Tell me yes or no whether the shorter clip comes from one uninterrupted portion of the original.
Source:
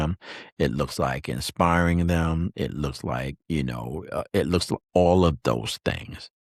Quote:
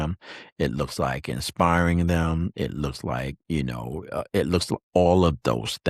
yes